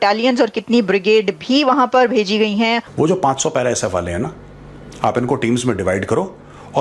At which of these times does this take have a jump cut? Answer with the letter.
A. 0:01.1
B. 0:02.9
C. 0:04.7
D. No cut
B